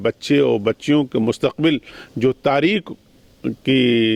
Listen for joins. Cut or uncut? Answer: uncut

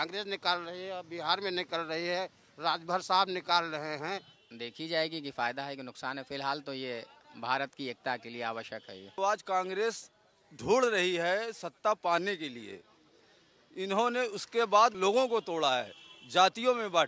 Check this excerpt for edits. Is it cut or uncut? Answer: cut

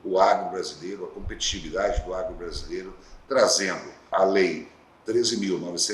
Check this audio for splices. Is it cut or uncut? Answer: cut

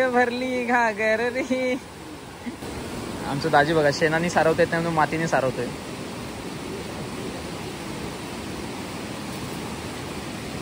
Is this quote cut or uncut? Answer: cut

